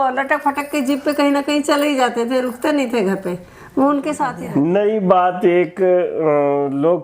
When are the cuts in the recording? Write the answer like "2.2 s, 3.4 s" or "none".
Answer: 4.4 s